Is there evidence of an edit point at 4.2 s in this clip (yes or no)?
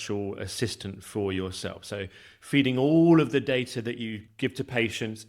yes